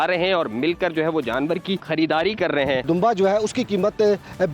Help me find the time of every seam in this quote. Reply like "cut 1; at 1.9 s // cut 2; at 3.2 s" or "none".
cut 1; at 1.8 s // cut 2; at 2.8 s